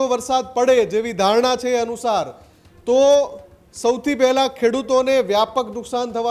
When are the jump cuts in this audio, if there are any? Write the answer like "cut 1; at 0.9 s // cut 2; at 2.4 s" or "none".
none